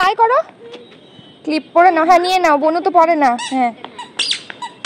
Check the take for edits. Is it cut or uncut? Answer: uncut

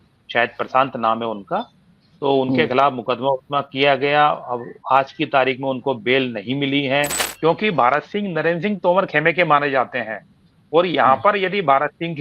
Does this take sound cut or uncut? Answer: cut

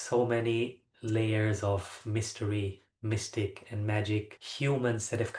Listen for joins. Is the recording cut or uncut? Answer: cut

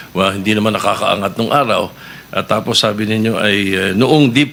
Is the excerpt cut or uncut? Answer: uncut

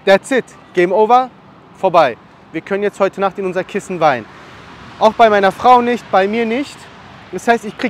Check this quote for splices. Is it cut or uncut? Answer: uncut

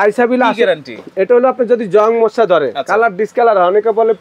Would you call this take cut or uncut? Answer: uncut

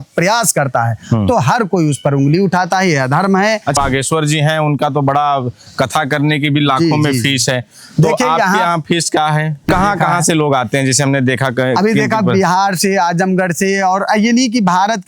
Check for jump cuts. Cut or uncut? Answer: cut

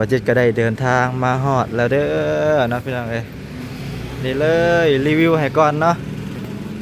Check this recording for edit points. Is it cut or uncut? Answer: uncut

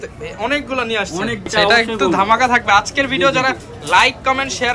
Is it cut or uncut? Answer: cut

